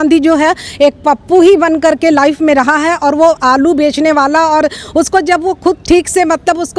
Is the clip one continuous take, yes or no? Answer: yes